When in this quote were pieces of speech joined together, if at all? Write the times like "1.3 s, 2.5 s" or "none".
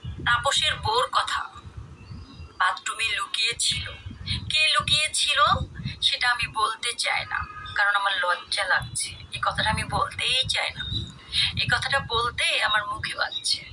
2.0 s